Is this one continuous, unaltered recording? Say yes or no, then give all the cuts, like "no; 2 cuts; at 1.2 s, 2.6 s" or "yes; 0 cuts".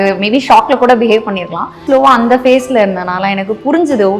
no; 1 cut; at 1.8 s